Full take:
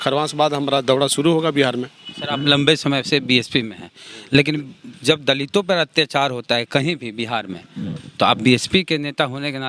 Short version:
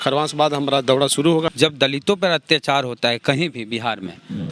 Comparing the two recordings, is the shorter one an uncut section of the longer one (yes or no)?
no